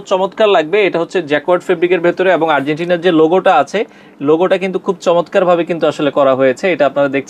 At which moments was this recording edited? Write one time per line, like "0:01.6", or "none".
none